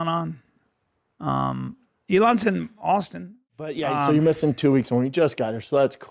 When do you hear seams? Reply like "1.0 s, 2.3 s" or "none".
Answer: 3.7 s